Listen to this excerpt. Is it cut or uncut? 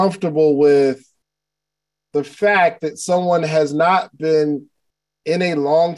uncut